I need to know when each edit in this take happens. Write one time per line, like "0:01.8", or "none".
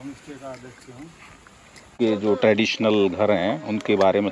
0:01.9

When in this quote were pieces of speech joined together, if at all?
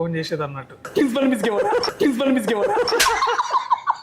0:00.9
0:02.9

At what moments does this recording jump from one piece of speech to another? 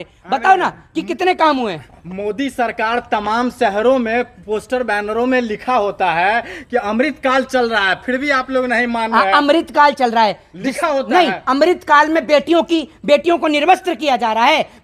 none

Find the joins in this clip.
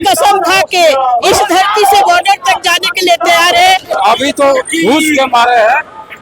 0:03.9

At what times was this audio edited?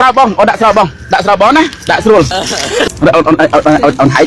0:02.8

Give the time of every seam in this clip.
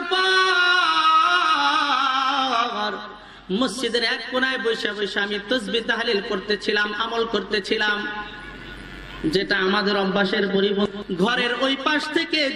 0:10.8

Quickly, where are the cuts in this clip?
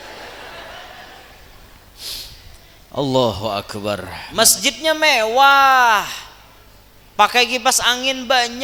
0:04.2

